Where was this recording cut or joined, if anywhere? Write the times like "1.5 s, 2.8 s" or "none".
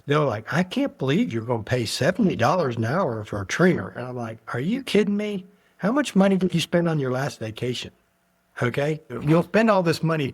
9.1 s

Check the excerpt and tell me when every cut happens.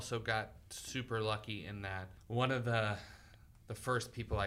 2.1 s

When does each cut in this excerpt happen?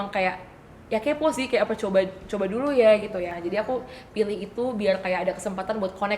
3.4 s

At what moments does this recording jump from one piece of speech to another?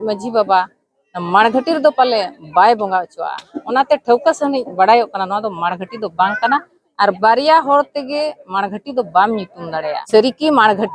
10.0 s

